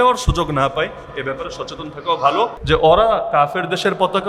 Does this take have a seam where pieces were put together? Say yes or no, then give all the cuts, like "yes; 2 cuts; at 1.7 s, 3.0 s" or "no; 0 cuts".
yes; 1 cut; at 2.6 s